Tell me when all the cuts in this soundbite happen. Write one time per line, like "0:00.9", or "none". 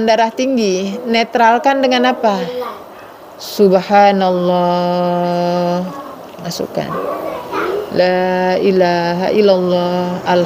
none